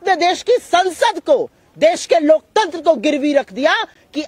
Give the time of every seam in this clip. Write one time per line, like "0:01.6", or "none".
none